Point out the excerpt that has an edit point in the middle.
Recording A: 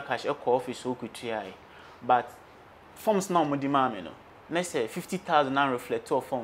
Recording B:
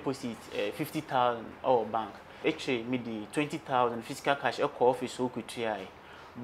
B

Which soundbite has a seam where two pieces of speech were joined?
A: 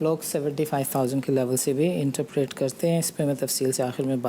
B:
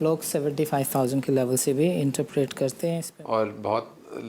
B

